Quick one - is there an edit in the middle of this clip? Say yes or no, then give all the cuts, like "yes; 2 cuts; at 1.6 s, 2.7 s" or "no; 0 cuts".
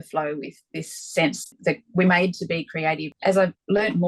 yes; 2 cuts; at 1.5 s, 3.1 s